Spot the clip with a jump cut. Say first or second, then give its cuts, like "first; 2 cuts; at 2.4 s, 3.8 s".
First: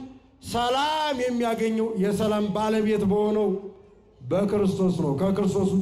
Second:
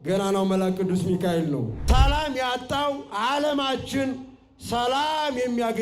second; 1 cut; at 1.8 s